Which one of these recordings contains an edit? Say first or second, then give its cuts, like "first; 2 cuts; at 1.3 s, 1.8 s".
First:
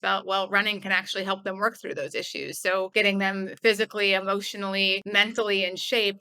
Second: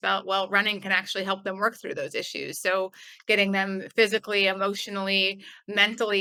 first; 2 cuts; at 2.9 s, 5.0 s